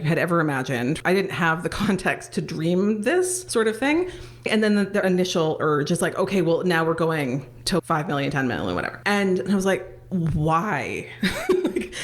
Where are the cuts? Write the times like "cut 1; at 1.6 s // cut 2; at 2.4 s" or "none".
cut 1; at 1.0 s // cut 2; at 3.4 s // cut 3; at 4.5 s // cut 4; at 7.8 s // cut 5; at 8.9 s // cut 6; at 9.9 s

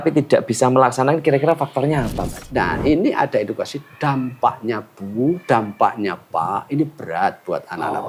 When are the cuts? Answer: cut 1; at 2.3 s

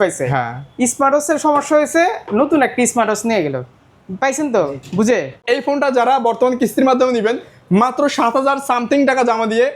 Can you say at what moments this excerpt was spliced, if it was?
cut 1; at 5.4 s

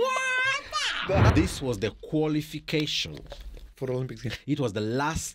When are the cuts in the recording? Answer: cut 1; at 1.3 s

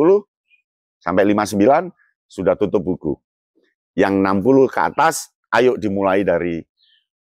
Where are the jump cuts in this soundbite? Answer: none

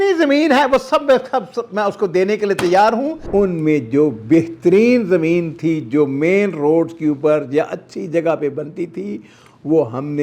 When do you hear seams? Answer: cut 1; at 3.2 s

